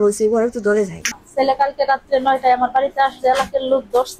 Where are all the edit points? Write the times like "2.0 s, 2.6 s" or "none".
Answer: 1.2 s

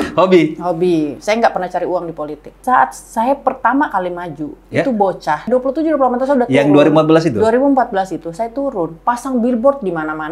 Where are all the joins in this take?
2.6 s, 5.5 s

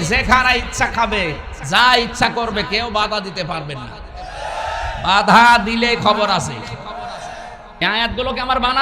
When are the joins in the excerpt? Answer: 7.7 s

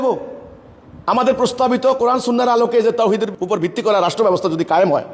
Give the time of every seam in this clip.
3.3 s

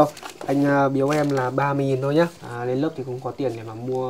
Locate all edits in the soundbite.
2.5 s

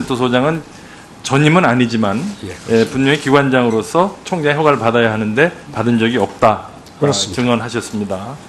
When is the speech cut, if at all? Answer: 6.1 s

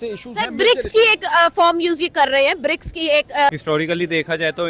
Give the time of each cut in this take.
3.5 s

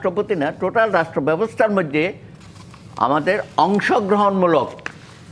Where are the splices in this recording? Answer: none

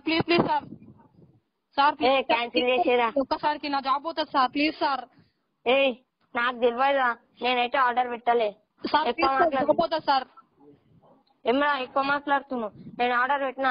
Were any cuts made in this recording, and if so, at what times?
12.4 s

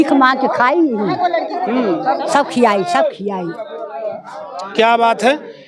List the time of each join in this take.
none

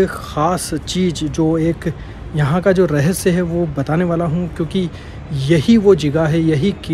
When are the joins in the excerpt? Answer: none

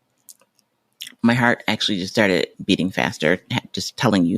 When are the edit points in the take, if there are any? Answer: 2.5 s

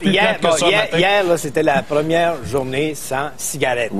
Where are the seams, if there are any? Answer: none

